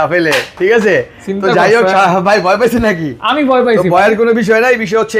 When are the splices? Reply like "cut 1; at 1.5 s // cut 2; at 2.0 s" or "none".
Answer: none